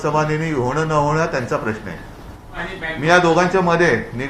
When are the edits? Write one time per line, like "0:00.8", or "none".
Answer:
0:02.6